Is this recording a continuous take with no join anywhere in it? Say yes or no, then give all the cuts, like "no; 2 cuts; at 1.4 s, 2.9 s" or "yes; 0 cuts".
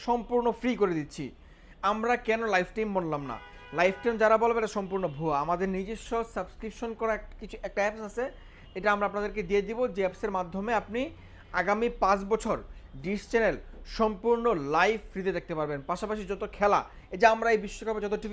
yes; 0 cuts